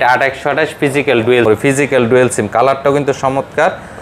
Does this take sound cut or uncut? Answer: cut